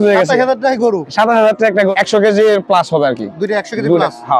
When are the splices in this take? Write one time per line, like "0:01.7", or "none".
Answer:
0:01.9